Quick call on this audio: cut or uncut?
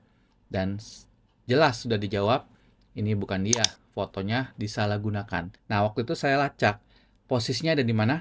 cut